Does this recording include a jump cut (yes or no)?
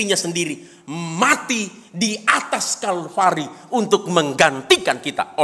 no